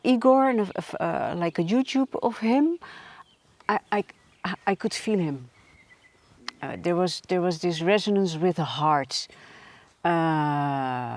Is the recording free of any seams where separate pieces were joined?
yes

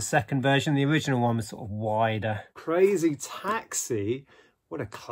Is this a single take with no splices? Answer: no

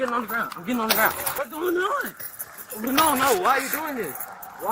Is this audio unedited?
no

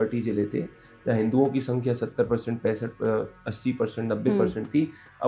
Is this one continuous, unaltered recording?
yes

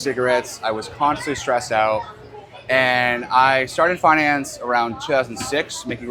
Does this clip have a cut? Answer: no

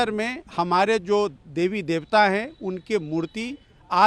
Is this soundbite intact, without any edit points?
yes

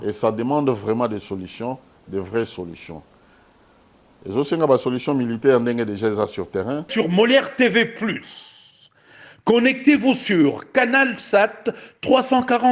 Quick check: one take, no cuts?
no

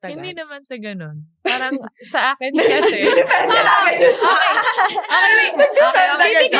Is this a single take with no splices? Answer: yes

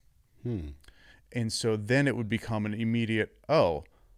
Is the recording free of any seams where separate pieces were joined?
yes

